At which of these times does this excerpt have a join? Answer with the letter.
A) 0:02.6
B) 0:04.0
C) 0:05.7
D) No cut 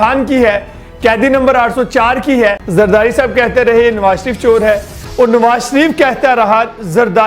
A